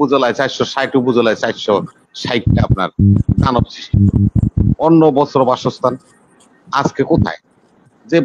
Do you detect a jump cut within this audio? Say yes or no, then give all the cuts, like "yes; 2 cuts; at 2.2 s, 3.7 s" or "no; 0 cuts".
yes; 1 cut; at 4.8 s